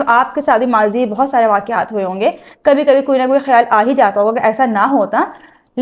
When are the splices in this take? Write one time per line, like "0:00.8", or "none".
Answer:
none